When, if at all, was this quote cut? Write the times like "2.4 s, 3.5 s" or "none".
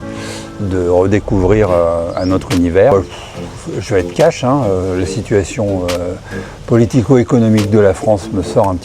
2.9 s

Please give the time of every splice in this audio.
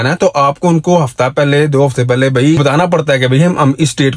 2.6 s

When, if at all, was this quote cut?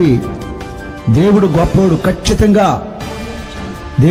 none

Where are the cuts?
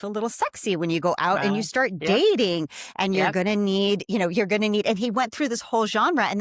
none

